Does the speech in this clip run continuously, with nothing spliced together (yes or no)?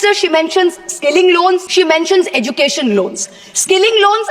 no